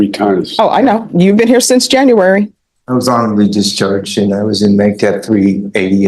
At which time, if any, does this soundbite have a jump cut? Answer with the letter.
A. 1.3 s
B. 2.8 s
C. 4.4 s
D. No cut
D